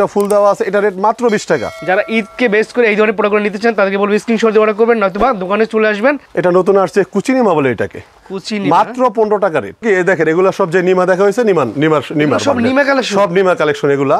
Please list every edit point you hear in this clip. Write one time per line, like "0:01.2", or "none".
0:01.7
0:06.3
0:09.8